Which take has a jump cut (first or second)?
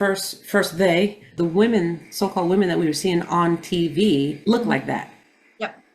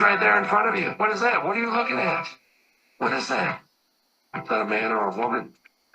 first